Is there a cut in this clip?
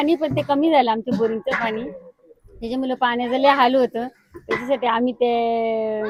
no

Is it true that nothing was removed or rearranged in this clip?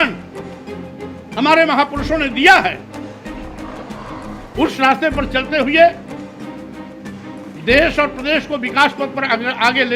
yes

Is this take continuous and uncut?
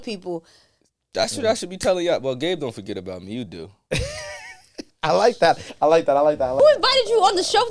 no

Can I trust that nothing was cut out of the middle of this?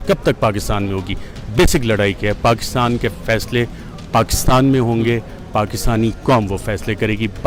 yes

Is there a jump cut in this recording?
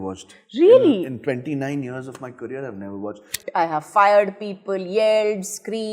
yes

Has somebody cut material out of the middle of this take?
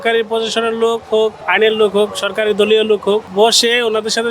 yes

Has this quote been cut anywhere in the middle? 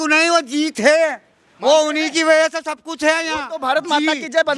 no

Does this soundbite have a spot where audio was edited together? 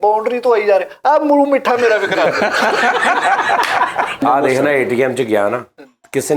yes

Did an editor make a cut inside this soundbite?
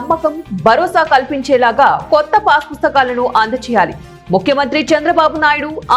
no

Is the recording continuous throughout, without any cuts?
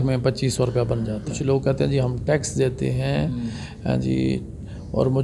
no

